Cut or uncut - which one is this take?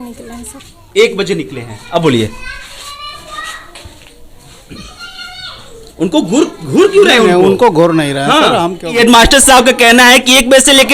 cut